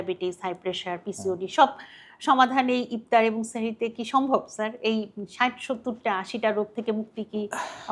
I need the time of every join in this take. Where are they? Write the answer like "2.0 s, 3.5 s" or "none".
none